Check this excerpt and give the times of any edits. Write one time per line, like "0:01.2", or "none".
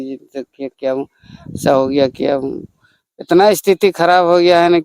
none